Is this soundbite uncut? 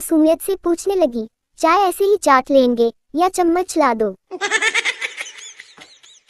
no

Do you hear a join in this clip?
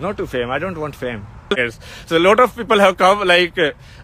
yes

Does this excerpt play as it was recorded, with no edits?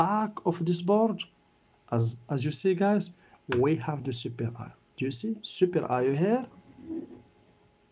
yes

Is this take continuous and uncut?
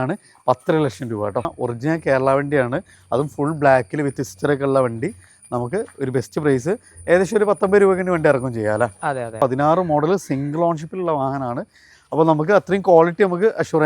no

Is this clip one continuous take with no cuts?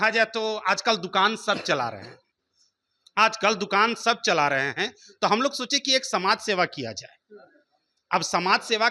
yes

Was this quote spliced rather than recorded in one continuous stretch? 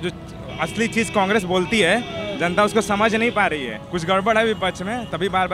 yes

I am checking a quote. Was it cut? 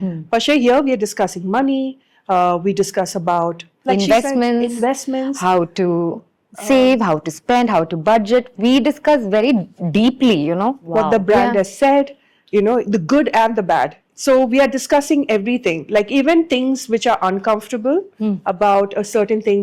no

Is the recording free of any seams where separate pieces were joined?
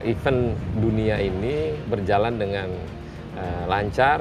yes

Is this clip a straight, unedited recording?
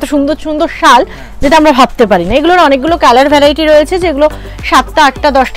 yes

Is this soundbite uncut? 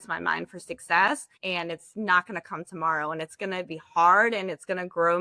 no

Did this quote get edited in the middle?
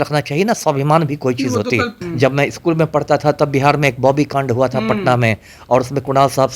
yes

